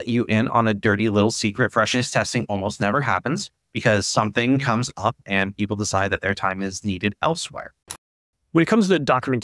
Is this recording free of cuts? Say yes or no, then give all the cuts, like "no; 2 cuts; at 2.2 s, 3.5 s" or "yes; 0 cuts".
no; 1 cut; at 8.3 s